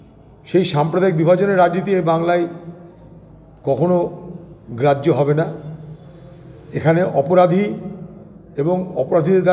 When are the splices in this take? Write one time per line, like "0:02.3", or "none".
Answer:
none